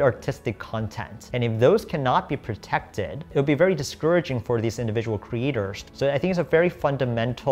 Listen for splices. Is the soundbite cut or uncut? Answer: cut